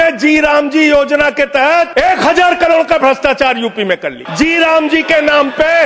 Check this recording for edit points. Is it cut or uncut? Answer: cut